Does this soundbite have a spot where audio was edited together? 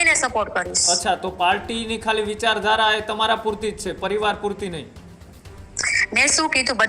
no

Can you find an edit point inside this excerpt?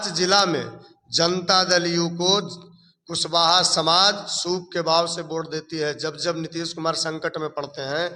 no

